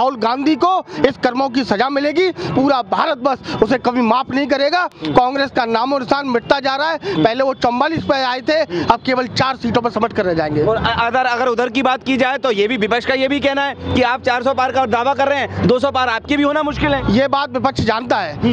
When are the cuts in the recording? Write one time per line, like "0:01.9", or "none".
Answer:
none